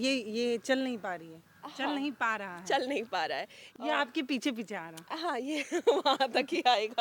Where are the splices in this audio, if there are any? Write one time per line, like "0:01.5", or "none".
0:03.6

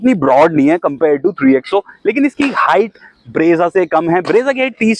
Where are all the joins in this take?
none

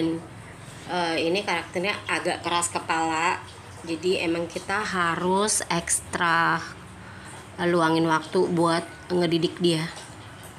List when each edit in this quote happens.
none

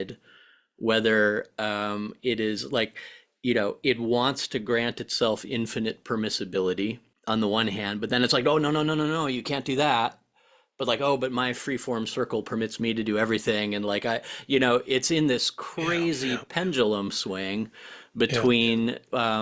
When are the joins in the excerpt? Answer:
0:07.1

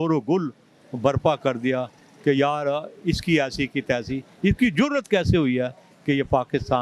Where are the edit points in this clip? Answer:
none

